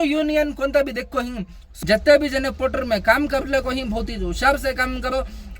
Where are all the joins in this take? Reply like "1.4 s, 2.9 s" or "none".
1.6 s